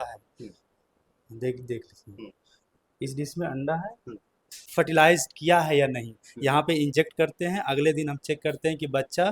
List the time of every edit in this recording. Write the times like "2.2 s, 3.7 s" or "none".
4.6 s

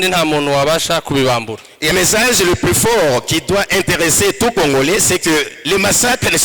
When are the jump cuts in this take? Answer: 1.9 s

